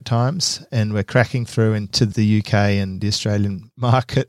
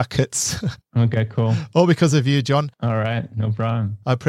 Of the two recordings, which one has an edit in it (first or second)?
first